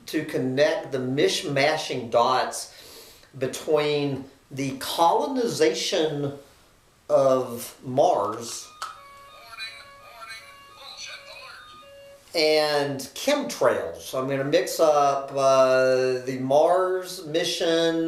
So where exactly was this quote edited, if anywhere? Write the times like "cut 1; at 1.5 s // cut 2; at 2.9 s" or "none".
none